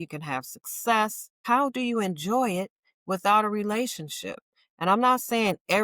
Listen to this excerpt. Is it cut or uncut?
cut